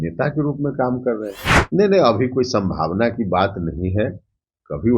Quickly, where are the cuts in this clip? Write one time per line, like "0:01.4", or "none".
0:01.5